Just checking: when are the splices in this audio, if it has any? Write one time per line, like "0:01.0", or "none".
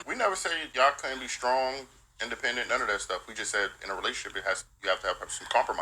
0:02.8

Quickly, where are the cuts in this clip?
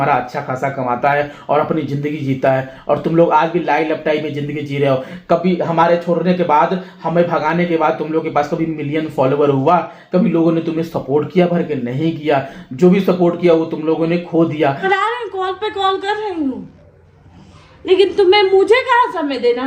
0:14.8

